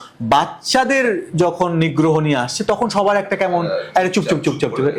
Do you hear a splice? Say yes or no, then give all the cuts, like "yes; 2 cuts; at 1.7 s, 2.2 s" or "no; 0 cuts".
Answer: no; 0 cuts